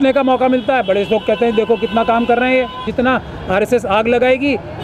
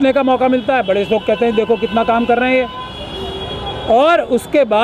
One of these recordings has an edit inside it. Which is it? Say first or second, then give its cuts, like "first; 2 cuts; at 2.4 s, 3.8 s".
first; 1 cut; at 2.9 s